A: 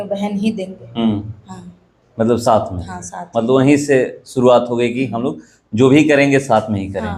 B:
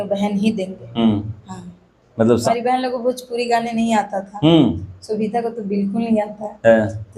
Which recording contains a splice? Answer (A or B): B